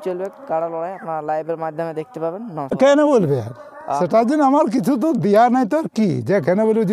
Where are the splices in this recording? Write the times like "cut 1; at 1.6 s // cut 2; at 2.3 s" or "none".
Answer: cut 1; at 2.7 s